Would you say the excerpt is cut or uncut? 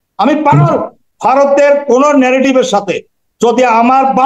cut